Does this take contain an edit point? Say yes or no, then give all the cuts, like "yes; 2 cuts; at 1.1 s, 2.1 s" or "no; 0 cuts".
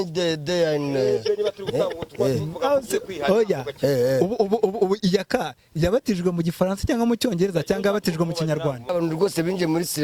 yes; 1 cut; at 8.9 s